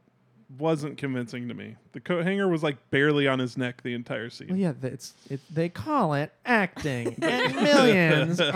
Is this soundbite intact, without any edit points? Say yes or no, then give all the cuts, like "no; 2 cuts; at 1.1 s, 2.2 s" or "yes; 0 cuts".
yes; 0 cuts